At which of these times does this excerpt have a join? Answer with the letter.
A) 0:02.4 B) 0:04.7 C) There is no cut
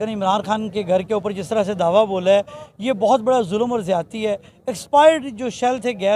C